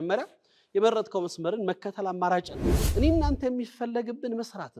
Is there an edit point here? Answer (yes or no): yes